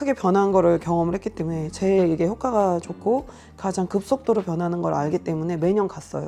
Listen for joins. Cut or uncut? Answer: uncut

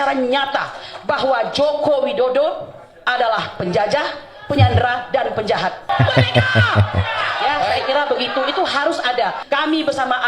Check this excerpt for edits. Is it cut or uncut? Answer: cut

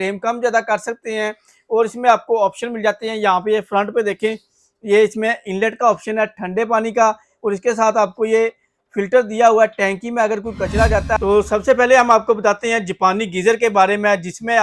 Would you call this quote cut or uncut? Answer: cut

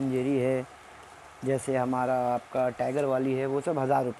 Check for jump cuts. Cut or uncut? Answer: uncut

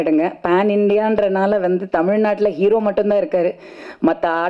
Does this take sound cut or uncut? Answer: uncut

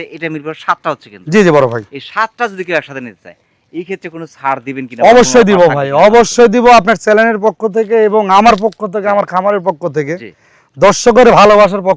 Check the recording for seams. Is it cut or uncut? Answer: uncut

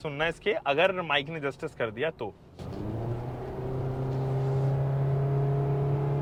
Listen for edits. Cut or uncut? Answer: uncut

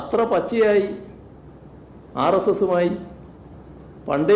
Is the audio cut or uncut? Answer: uncut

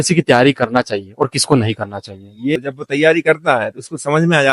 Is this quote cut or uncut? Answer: cut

